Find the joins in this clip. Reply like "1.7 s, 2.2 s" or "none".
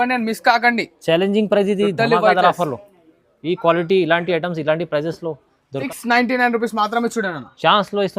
5.8 s